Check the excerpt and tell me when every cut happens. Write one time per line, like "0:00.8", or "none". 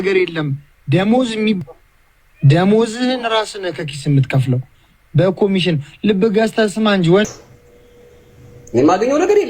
0:01.6
0:07.2